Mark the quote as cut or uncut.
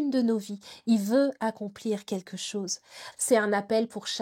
cut